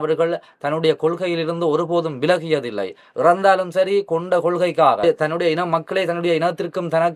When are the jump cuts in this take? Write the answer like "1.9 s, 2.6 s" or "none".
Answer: 5.0 s